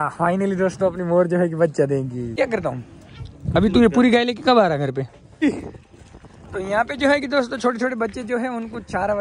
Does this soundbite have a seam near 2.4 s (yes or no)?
yes